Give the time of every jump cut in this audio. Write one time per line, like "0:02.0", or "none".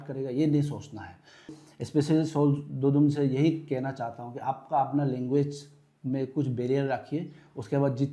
0:01.6